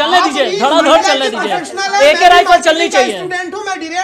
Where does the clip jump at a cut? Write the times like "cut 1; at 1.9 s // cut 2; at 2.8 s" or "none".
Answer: none